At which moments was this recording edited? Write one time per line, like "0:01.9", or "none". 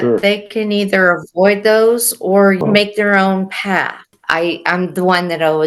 0:02.6
0:04.0